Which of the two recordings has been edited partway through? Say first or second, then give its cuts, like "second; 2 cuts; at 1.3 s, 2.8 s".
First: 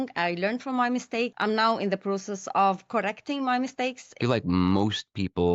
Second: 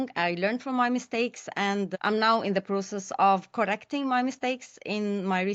first; 2 cuts; at 1.4 s, 4.2 s